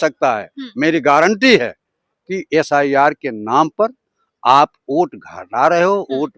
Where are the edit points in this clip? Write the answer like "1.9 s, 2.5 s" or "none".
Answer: none

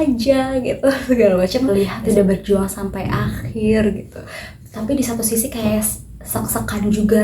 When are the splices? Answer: 1.7 s

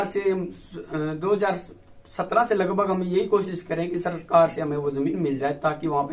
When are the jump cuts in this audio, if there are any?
none

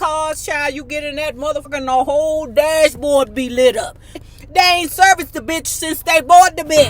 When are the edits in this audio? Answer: 1.7 s, 4.2 s

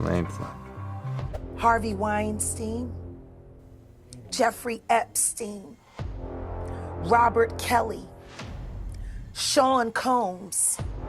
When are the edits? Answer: 1.3 s

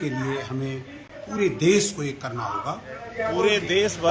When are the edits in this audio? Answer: 3.1 s

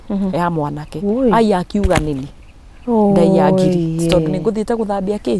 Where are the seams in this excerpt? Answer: none

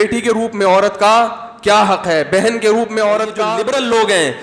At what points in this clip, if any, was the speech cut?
3.5 s

